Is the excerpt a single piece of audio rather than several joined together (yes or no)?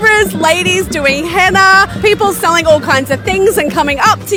yes